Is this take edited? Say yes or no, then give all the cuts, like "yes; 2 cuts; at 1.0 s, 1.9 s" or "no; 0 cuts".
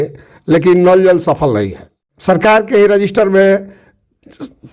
yes; 1 cut; at 2.1 s